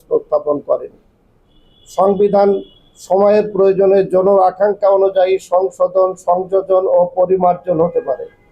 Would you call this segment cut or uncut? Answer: uncut